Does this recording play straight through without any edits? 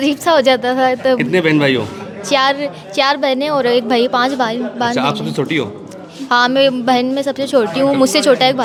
yes; 0 cuts

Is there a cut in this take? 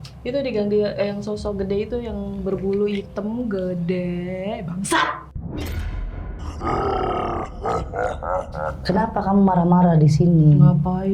yes; 2 cuts; at 6.5 s, 8.8 s

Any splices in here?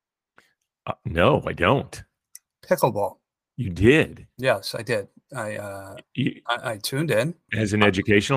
yes; 1 cut; at 7.4 s

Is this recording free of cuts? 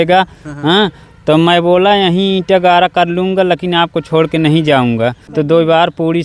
no; 1 cut; at 5.2 s

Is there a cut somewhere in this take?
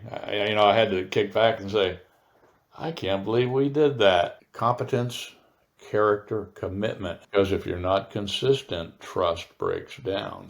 yes; 2 cuts; at 4.4 s, 7.2 s

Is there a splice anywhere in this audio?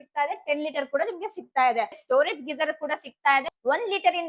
yes; 2 cuts; at 2.0 s, 3.5 s

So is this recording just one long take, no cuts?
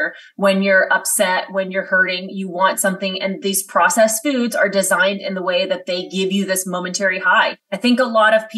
no; 1 cut; at 7.6 s

